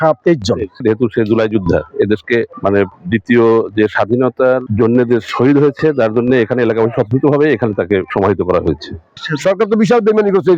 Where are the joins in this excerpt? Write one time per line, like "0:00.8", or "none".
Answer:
0:00.8
0:02.5
0:04.7
0:08.1
0:09.1